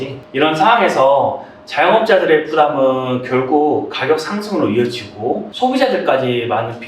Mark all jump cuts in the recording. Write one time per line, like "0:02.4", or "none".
0:05.5